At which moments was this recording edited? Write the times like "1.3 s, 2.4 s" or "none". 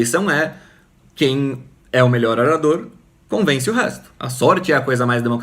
4.2 s